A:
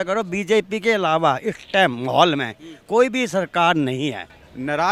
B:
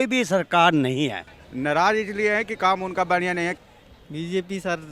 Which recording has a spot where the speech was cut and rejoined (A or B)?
B